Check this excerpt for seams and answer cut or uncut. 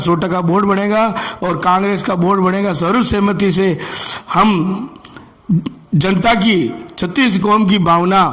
uncut